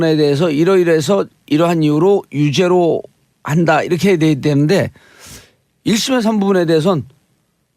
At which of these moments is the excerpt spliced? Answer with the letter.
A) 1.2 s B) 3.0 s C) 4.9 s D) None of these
B